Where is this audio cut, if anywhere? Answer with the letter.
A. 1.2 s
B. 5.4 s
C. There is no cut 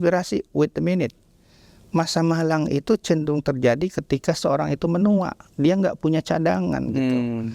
C